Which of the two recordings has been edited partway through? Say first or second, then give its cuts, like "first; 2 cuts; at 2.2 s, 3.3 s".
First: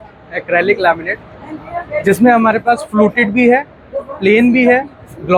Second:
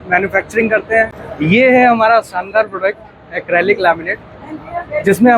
second; 1 cut; at 1.2 s